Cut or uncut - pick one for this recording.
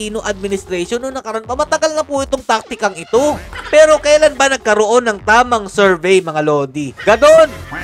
cut